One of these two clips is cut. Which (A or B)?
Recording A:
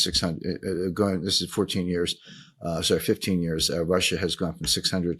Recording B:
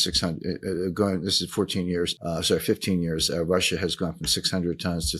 B